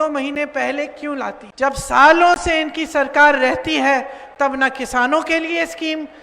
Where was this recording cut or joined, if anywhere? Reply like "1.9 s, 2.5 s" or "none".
1.4 s